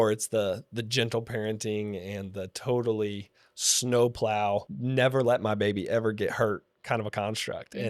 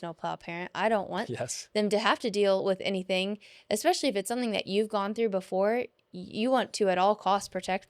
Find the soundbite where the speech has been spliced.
first; 2 cuts; at 4.8 s, 6.7 s

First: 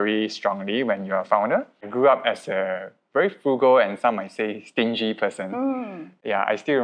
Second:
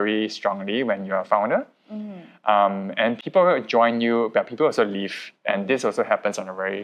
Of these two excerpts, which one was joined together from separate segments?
first; 1 cut; at 1.9 s

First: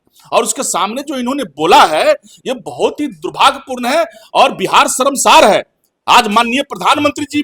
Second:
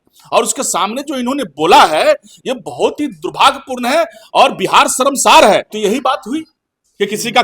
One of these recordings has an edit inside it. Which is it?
second; 1 cut; at 5.7 s

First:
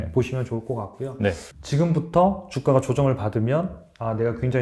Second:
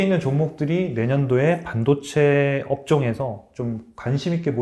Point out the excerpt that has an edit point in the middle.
first; 1 cut; at 1.5 s

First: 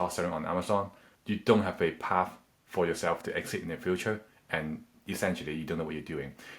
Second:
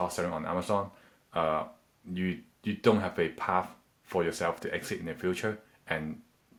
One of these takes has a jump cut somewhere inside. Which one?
first; 2 cuts; at 1.1 s, 4.9 s

